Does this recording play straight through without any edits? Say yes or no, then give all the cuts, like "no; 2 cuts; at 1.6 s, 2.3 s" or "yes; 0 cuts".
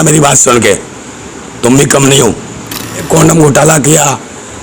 no; 1 cut; at 3.0 s